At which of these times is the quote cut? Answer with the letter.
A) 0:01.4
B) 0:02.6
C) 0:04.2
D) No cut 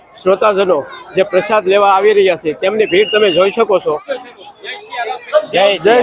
C